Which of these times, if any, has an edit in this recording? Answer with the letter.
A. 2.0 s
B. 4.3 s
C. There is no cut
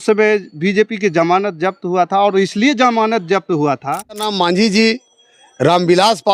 B